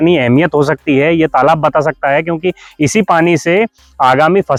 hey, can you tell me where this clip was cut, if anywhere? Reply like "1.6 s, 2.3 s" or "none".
none